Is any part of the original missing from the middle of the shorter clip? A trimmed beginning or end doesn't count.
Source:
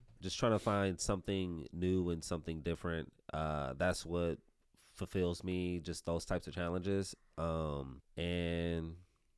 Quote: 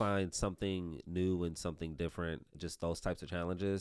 yes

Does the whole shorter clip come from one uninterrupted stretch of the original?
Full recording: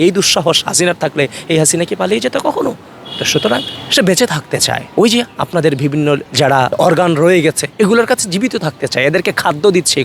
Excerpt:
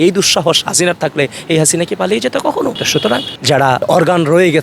no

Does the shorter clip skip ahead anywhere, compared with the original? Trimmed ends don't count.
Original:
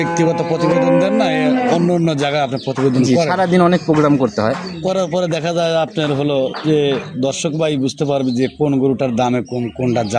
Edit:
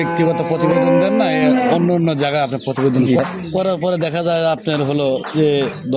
yes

